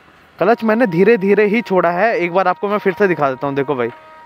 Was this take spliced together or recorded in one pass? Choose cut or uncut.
uncut